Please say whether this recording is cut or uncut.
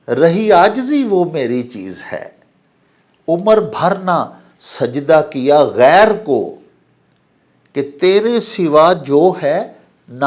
uncut